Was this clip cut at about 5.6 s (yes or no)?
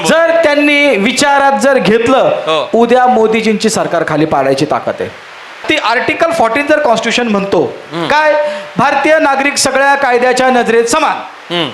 yes